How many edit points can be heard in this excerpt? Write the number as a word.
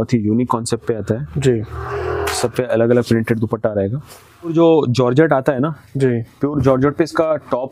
one